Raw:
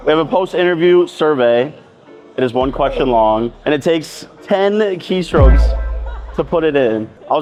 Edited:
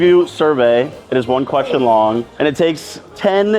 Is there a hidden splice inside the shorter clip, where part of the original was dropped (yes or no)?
yes